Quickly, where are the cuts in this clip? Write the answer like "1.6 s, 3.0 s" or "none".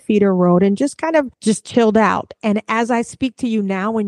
1.3 s